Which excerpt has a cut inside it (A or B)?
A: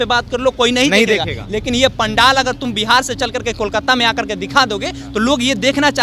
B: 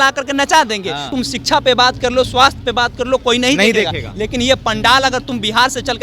B